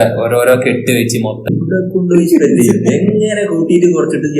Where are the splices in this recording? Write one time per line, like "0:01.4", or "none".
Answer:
0:01.5